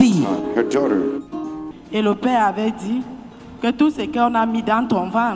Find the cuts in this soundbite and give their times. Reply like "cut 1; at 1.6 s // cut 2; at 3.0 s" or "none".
cut 1; at 1.8 s